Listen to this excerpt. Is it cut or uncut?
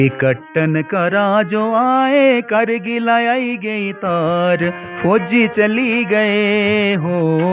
uncut